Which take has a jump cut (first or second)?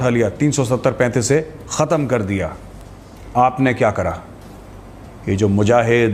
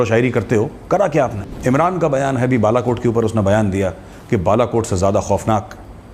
second